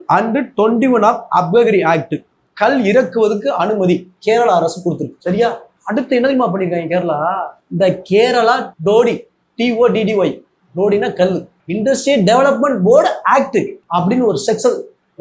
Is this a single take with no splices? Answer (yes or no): yes